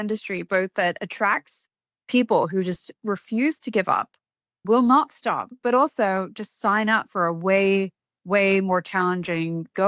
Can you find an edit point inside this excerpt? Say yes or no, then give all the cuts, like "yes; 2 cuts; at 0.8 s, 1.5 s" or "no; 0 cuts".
no; 0 cuts